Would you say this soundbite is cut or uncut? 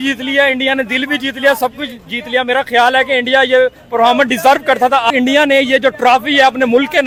uncut